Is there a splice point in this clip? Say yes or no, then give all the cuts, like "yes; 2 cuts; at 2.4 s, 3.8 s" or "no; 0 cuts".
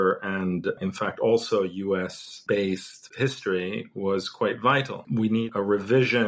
yes; 3 cuts; at 2.3 s, 3.0 s, 5.0 s